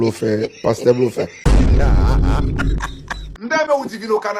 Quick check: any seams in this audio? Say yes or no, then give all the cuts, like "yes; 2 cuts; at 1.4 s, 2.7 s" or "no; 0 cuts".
yes; 1 cut; at 3.4 s